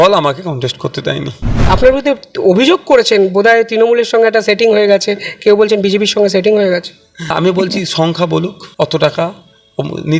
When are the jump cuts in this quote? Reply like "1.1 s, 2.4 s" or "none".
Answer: 1.6 s, 7.3 s, 8.6 s